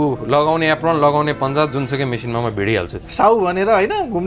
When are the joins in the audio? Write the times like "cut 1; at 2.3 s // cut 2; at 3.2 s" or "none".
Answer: none

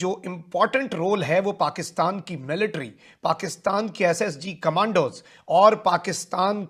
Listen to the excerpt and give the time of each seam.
none

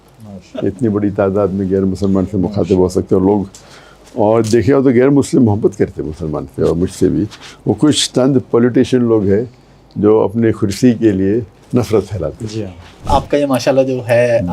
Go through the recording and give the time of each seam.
cut 1; at 13.0 s

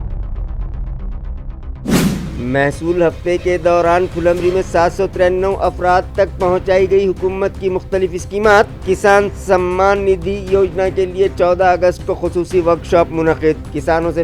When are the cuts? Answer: cut 1; at 2.2 s

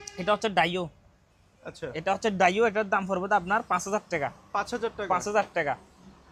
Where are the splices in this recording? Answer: none

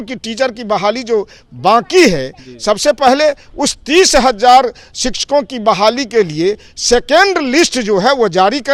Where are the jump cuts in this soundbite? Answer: none

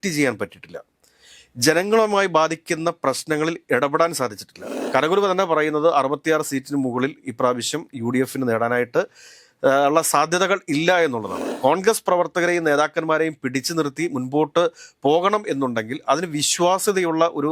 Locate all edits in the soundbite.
cut 1; at 4.7 s // cut 2; at 11.4 s

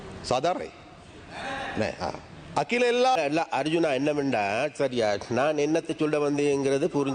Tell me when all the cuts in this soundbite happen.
cut 1; at 3.2 s

